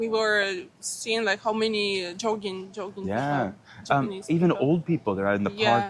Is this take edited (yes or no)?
no